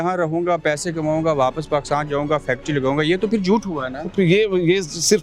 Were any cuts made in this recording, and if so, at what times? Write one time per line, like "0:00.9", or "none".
none